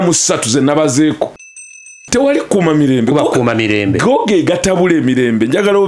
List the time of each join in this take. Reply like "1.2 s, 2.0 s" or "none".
2.0 s